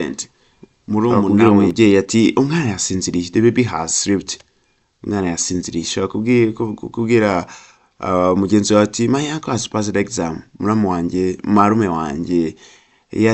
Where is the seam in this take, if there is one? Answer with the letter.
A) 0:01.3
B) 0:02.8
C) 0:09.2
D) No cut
A